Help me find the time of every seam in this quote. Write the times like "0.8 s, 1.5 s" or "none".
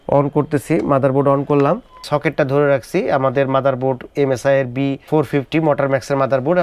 1.9 s, 5.1 s